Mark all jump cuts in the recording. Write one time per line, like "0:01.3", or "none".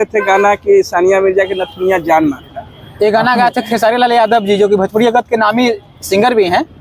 none